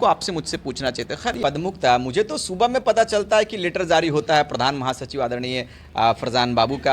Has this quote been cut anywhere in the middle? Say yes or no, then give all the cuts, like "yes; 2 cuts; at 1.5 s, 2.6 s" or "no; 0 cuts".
yes; 1 cut; at 1.4 s